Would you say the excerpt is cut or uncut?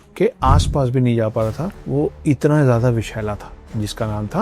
cut